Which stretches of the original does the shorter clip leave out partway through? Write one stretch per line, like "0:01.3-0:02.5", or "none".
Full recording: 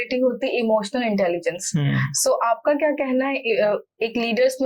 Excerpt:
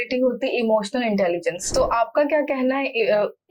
0:01.6-0:02.1